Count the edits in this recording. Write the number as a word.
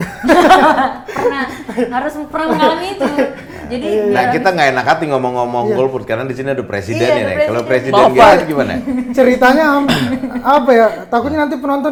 zero